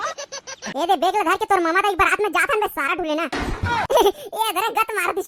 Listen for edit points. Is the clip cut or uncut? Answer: uncut